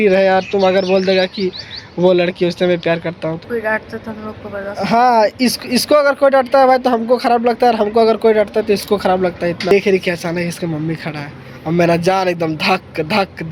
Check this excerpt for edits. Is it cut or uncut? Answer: cut